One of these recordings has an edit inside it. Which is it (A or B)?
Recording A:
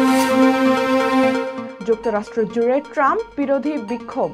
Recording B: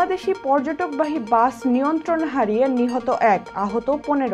A